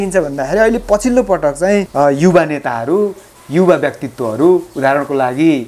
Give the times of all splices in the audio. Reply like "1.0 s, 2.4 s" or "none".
1.9 s